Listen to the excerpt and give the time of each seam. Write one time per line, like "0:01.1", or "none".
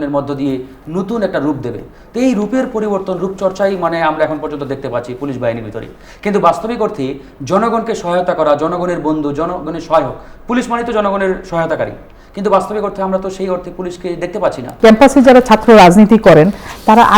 0:14.7